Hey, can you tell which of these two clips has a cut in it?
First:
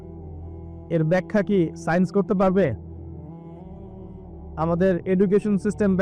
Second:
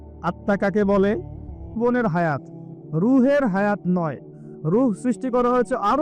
second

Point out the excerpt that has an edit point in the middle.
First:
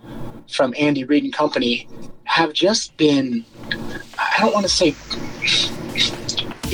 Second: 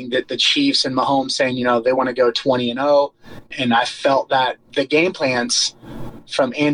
second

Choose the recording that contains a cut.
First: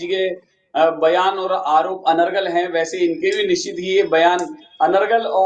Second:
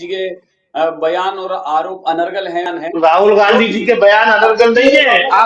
second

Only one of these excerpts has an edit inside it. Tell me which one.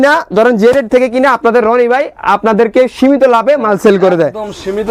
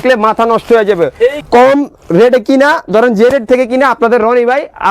second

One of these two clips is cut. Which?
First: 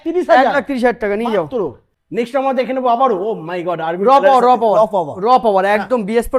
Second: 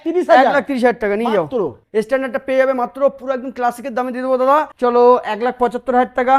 second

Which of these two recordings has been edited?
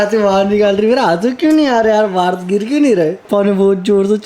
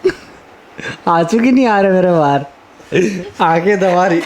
first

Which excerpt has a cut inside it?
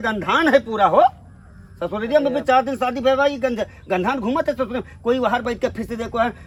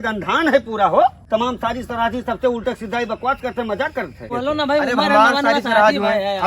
second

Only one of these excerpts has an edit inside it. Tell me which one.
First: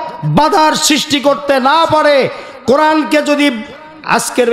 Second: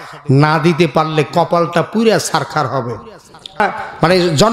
second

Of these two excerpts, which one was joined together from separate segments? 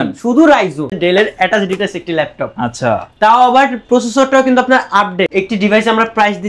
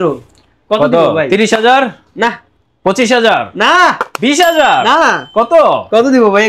first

